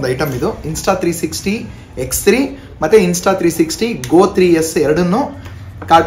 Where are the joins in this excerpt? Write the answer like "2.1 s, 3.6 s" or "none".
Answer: none